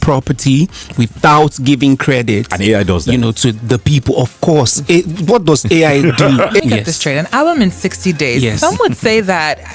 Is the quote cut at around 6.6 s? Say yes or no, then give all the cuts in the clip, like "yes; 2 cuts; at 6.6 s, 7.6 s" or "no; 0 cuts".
yes; 1 cut; at 6.6 s